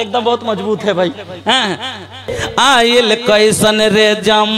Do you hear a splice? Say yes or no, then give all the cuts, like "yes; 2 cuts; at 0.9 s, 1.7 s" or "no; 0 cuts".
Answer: yes; 1 cut; at 2.3 s